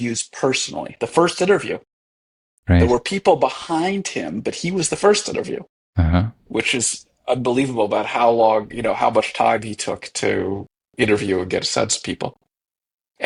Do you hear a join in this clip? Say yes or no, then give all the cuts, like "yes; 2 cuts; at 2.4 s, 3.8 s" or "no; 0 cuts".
no; 0 cuts